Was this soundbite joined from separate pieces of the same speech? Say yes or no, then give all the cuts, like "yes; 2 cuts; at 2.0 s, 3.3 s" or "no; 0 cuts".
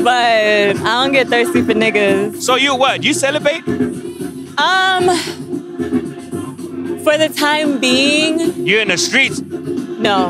no; 0 cuts